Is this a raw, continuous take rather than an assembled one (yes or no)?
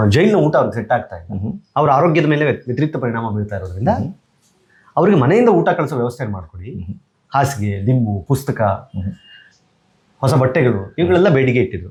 yes